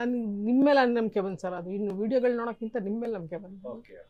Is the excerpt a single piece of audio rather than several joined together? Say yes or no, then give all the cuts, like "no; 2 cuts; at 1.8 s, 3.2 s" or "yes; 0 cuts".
yes; 0 cuts